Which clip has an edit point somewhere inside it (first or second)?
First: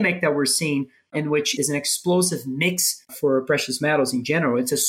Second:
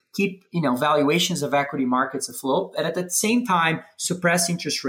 first